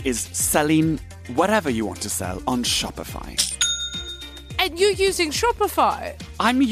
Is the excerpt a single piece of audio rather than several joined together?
no; 1 cut; at 4.4 s

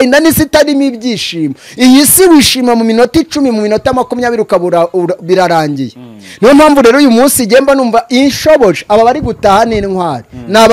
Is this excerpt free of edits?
yes; 0 cuts

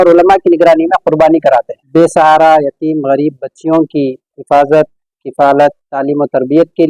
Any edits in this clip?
yes; 1 cut; at 1.8 s

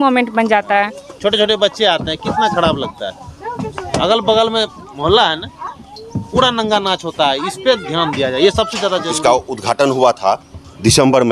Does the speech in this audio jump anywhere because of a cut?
yes; 1 cut; at 9.1 s

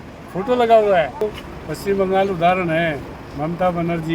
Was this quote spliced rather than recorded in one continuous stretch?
yes; 1 cut; at 1.2 s

